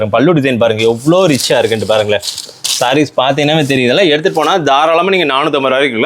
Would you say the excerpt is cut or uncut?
uncut